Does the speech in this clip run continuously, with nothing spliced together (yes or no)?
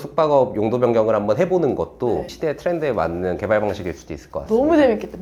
yes